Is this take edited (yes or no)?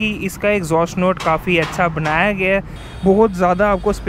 yes